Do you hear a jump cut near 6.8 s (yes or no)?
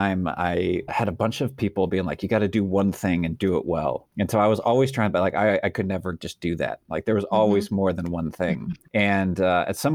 no